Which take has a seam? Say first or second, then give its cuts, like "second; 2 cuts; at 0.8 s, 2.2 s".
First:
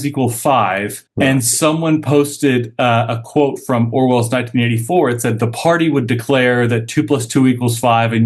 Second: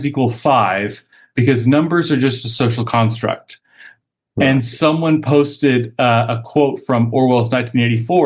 first; 1 cut; at 1.0 s